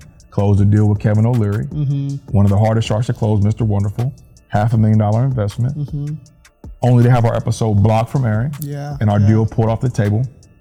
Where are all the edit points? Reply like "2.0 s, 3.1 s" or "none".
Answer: none